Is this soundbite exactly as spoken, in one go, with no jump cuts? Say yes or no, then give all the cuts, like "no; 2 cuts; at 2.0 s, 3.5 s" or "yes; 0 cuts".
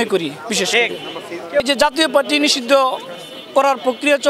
no; 1 cut; at 1.7 s